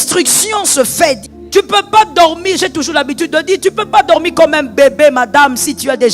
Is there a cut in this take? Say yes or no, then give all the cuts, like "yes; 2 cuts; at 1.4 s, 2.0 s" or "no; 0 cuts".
yes; 1 cut; at 1.2 s